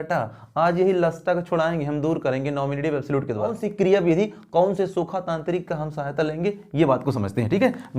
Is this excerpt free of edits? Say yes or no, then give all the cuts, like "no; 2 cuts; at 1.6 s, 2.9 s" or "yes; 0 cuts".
no; 1 cut; at 3.6 s